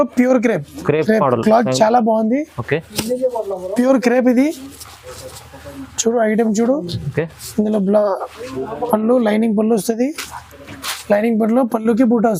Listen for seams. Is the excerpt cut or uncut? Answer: uncut